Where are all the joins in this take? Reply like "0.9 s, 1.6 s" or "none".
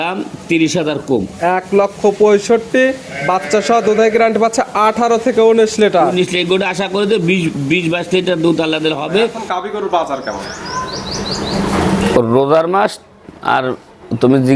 9.4 s